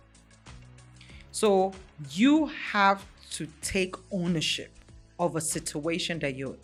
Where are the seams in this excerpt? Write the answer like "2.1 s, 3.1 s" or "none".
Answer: none